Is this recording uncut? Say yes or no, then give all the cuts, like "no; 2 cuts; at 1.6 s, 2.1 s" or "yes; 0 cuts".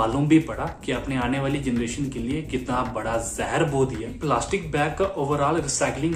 yes; 0 cuts